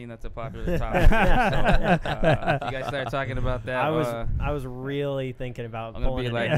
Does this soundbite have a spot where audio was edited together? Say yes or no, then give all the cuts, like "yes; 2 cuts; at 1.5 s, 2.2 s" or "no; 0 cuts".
no; 0 cuts